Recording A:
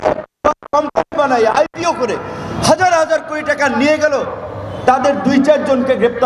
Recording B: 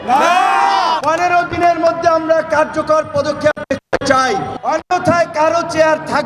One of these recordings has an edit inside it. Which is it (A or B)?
B